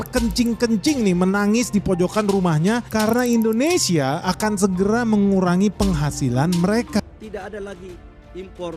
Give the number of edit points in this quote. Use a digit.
1